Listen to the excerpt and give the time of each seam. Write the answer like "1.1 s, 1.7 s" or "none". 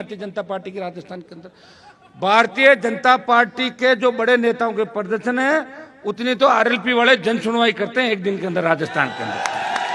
none